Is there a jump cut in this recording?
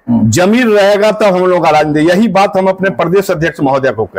no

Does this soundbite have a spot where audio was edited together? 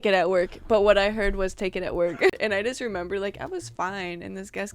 yes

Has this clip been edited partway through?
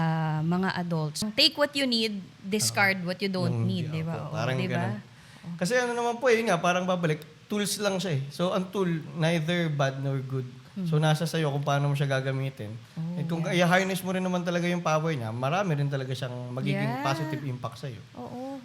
yes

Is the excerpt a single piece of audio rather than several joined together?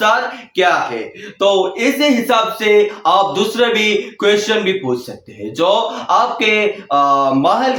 yes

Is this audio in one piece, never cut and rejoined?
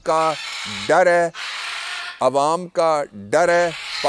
yes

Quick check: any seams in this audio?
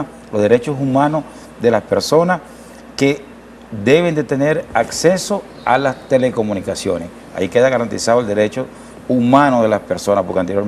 no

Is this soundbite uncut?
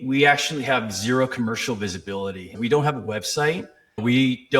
no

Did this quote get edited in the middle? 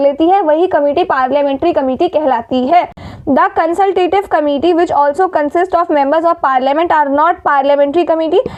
no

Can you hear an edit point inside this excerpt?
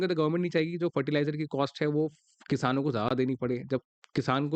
no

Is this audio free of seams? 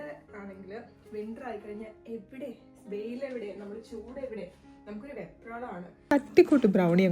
no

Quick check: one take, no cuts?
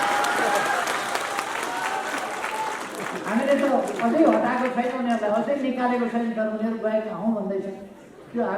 yes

